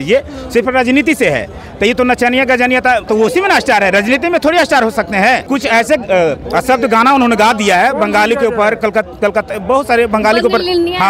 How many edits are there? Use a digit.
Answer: 2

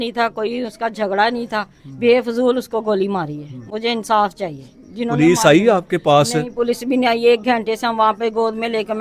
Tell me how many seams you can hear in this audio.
0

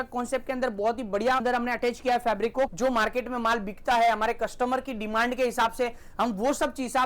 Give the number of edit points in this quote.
1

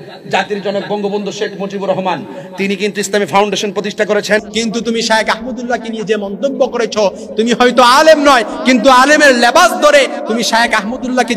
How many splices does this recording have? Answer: 1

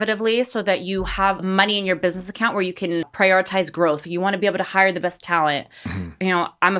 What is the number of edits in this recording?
2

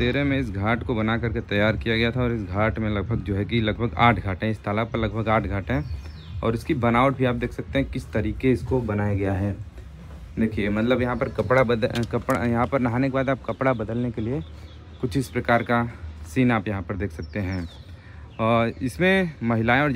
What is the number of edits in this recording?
0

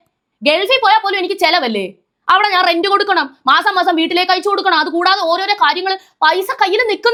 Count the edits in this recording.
0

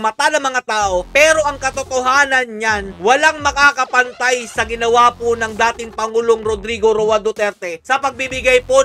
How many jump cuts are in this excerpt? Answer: 0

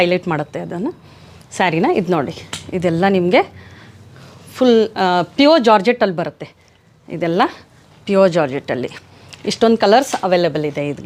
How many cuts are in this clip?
0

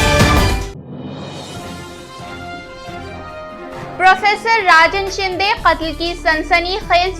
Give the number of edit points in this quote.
1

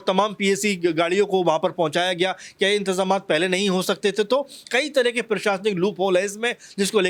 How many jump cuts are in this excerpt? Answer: 0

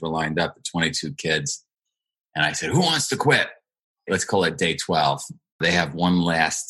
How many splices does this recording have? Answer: 2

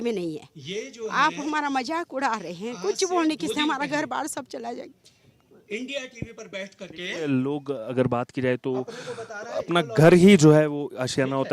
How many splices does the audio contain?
0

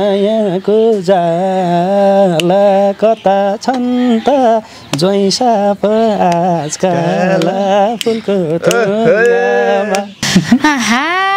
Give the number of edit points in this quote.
1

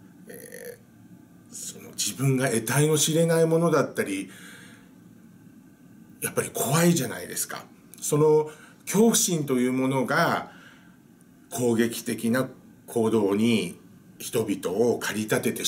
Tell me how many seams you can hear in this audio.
0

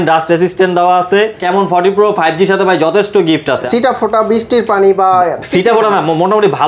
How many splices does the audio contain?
2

